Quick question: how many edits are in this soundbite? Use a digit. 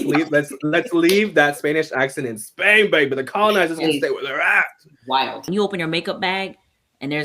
1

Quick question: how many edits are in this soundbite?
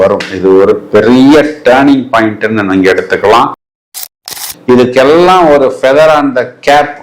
1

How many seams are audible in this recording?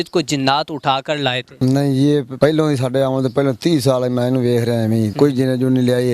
3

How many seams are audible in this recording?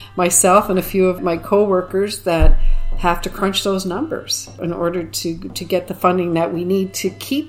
2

